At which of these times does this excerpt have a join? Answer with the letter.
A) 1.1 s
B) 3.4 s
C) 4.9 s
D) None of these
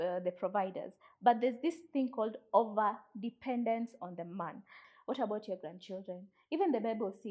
C